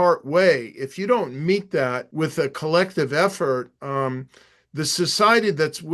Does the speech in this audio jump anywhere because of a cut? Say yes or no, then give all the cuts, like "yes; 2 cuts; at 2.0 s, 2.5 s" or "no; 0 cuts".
yes; 1 cut; at 2.0 s